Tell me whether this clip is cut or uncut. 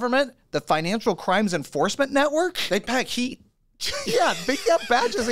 uncut